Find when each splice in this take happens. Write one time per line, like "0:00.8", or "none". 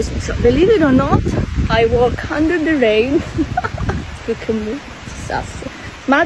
none

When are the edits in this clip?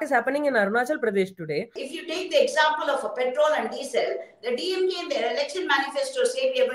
0:01.8

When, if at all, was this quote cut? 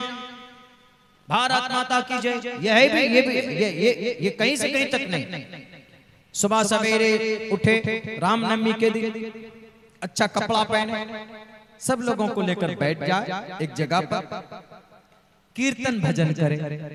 none

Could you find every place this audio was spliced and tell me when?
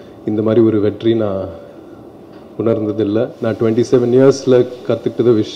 0:03.3

